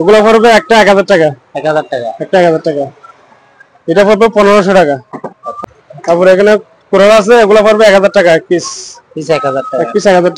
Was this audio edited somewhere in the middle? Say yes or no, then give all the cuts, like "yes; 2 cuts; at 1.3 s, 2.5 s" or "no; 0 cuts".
no; 0 cuts